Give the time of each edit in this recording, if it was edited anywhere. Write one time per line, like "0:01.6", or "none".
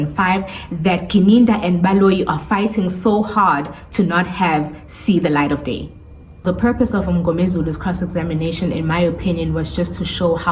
0:06.4